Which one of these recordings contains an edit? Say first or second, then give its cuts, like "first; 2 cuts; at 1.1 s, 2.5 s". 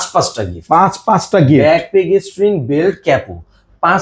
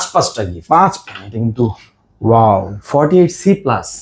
second; 1 cut; at 1.0 s